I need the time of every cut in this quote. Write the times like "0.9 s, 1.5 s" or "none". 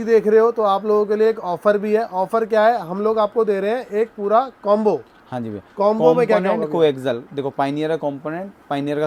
none